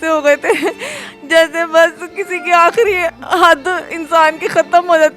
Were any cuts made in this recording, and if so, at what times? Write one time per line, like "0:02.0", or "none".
none